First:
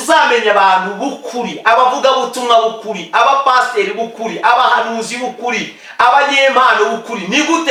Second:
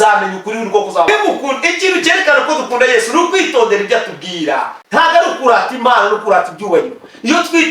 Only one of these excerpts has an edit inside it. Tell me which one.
second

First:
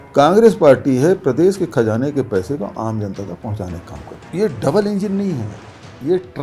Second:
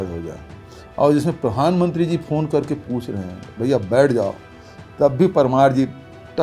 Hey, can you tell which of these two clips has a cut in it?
first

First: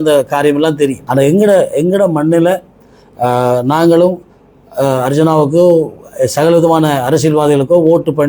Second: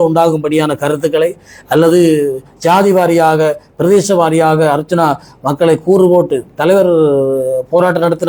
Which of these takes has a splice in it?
first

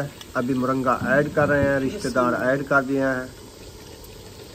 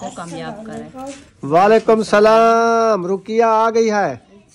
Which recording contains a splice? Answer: second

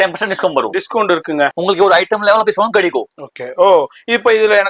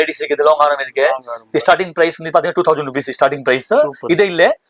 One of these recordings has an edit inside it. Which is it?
first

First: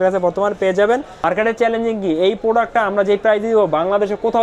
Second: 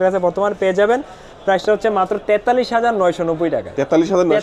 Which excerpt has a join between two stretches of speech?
first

